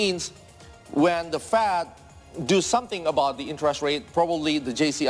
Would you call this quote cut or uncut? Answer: uncut